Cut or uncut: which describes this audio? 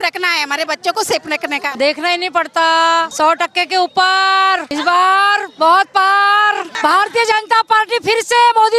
cut